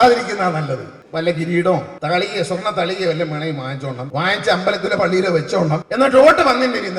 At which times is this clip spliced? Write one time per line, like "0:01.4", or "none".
0:01.0
0:01.9
0:04.0
0:05.8